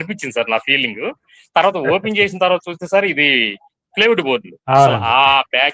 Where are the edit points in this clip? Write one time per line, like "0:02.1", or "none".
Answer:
none